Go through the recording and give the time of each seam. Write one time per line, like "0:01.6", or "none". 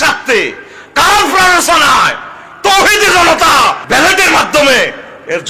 0:03.8

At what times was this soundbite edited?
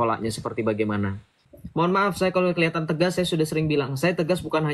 0:01.4

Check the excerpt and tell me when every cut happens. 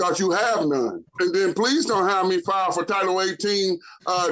0:01.0

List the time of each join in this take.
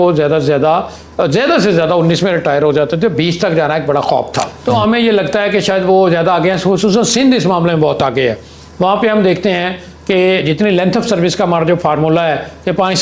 0:04.5

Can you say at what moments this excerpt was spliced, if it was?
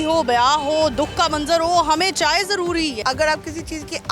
0:03.0

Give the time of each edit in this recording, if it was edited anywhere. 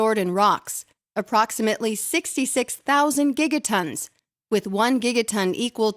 0:03.1

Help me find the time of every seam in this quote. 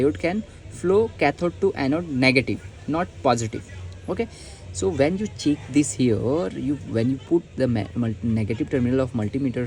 none

